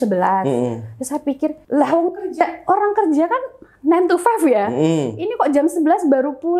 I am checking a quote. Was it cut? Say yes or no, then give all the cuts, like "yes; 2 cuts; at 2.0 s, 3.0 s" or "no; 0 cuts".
yes; 1 cut; at 1.6 s